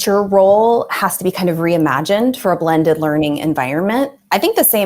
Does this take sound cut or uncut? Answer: uncut